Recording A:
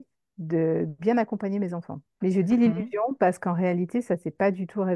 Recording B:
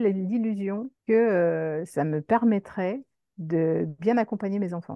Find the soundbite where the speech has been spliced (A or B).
B